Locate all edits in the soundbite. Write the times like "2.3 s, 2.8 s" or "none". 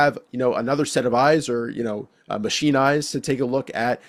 none